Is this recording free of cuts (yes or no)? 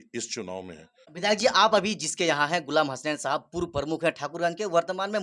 no